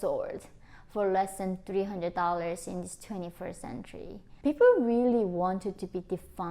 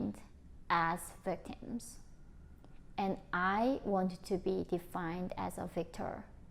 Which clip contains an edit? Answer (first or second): first